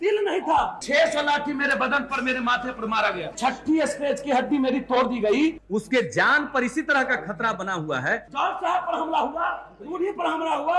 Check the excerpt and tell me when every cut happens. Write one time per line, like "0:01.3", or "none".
0:00.8
0:03.4
0:05.6
0:08.3